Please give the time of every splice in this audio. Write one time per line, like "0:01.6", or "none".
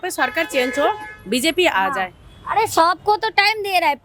none